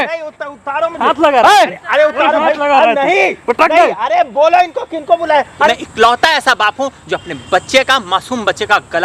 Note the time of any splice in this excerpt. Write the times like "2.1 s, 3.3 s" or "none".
5.5 s